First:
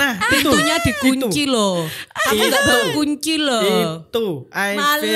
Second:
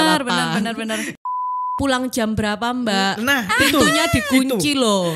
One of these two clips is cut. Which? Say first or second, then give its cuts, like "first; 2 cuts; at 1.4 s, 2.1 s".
second; 1 cut; at 1.5 s